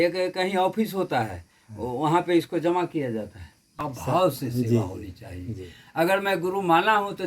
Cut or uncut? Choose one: cut